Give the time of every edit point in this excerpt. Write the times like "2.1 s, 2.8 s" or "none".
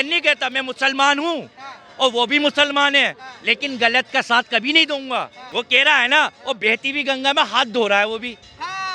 5.4 s